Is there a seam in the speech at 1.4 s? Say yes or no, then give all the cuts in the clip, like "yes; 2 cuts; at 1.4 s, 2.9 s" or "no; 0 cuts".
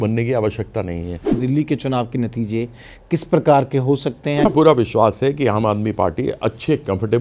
yes; 2 cuts; at 1.4 s, 4.4 s